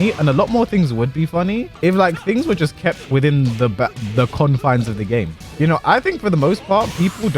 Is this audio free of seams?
no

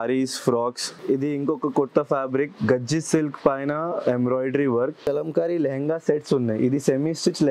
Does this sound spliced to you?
yes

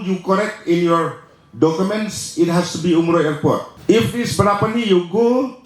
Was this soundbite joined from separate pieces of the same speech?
yes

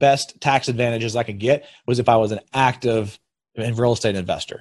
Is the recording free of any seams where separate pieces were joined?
yes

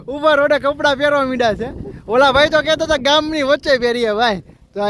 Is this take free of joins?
yes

